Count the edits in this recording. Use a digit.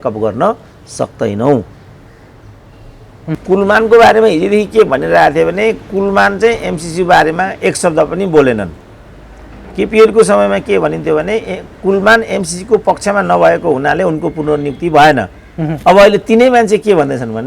1